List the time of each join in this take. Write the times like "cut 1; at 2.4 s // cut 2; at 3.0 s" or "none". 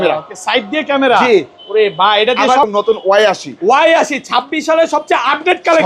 cut 1; at 2.7 s